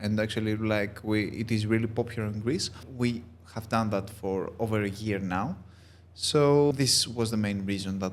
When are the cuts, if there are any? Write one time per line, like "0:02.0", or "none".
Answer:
0:02.8
0:06.7